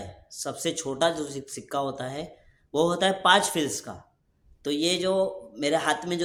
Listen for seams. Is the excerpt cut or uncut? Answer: uncut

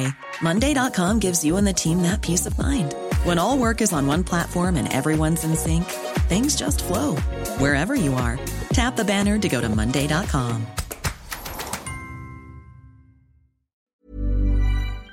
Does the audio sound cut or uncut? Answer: cut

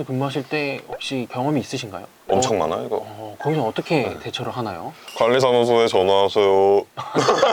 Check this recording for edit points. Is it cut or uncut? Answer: uncut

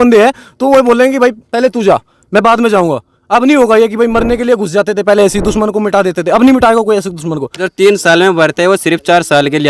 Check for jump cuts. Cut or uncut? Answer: cut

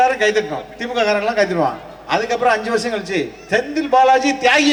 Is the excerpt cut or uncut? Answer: uncut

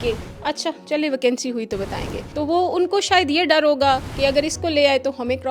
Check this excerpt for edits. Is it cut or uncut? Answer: cut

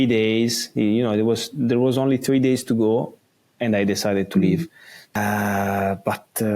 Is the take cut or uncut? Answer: cut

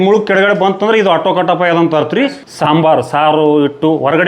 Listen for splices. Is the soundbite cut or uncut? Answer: cut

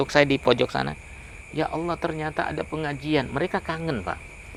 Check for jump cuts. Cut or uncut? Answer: uncut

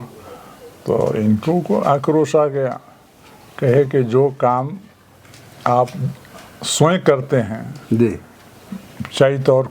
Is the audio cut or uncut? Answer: uncut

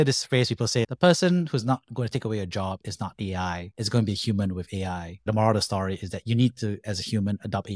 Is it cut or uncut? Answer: cut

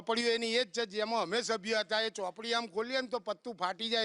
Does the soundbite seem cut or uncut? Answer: uncut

